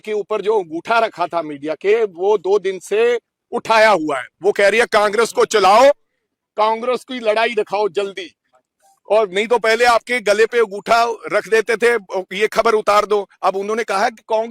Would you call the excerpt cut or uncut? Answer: uncut